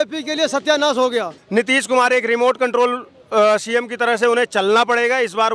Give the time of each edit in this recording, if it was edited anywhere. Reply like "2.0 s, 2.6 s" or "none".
1.4 s